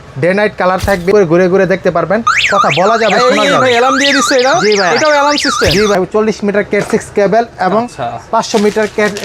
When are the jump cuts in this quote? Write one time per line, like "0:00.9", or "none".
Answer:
0:01.1
0:05.9